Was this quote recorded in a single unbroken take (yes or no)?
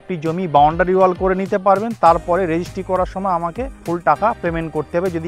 no